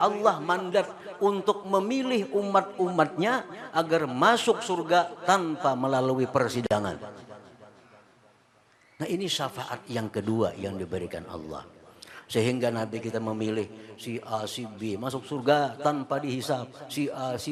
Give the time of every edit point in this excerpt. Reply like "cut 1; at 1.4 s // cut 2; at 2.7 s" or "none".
none

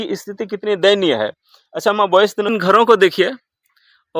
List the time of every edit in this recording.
cut 1; at 2.5 s

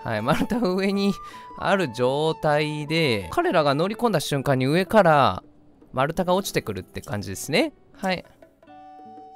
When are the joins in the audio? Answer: cut 1; at 3.3 s // cut 2; at 7.8 s

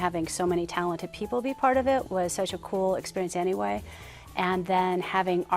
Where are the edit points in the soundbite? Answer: none

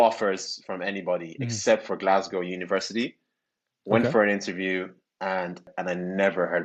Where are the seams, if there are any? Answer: cut 1; at 5.7 s

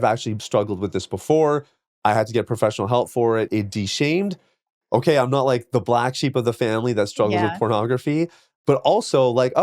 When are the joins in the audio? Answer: cut 1; at 3.5 s

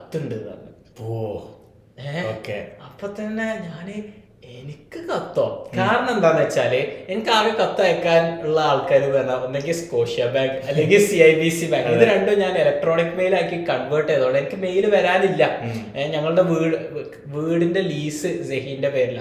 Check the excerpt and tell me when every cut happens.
none

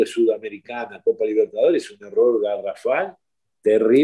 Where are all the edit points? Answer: none

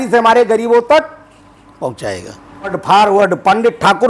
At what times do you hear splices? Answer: cut 1; at 2.8 s

